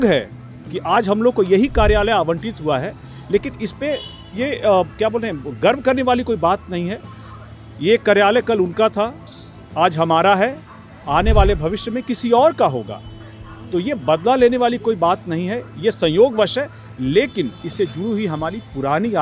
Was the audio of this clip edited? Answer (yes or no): no